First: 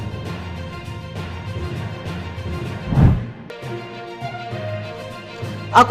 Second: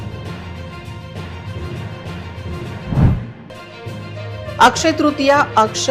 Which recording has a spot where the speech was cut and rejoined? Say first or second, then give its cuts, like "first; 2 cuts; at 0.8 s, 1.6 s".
first; 1 cut; at 3.3 s